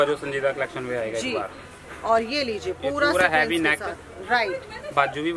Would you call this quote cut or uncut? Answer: uncut